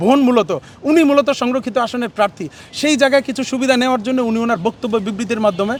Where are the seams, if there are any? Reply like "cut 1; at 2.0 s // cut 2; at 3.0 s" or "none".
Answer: none